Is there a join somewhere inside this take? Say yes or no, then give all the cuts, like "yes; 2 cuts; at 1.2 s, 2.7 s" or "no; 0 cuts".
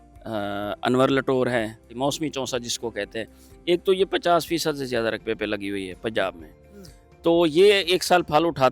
yes; 1 cut; at 1.9 s